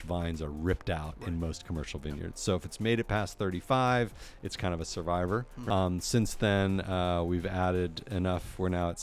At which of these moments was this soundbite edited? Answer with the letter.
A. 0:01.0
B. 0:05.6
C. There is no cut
B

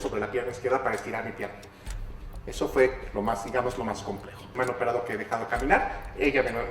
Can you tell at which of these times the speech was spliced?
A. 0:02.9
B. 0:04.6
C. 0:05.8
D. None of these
B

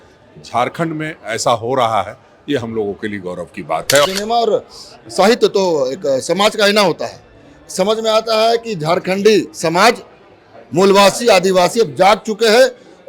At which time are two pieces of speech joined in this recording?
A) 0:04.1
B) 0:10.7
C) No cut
A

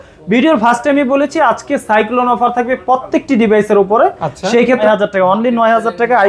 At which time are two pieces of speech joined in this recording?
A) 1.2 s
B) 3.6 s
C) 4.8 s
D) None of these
C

